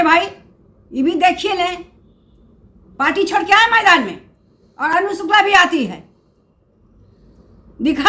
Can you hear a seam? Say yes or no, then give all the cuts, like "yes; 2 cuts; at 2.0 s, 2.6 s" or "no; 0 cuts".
no; 0 cuts